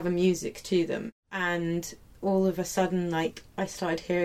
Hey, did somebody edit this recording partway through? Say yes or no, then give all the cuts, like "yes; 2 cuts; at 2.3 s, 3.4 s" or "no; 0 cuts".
yes; 1 cut; at 1.1 s